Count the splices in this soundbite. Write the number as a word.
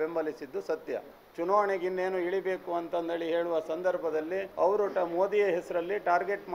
two